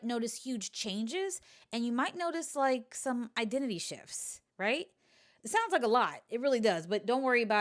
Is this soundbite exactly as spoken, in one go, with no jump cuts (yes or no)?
yes